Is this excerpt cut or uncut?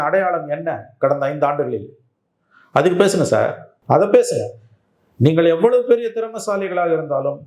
cut